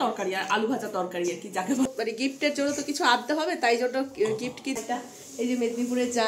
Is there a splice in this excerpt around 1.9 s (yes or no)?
yes